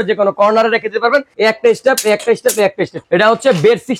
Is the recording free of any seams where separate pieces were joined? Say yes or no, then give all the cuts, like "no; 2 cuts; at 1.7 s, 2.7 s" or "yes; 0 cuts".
no; 2 cuts; at 1.3 s, 2.9 s